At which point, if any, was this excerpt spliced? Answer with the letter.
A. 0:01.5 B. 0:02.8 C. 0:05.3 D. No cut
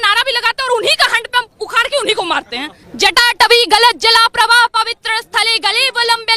B